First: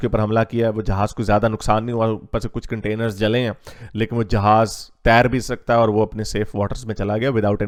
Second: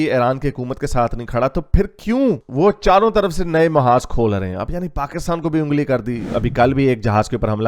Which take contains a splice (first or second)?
second